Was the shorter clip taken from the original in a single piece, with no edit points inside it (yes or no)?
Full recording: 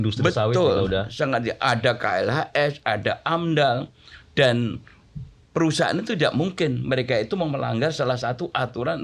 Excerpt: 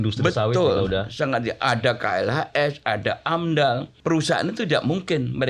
no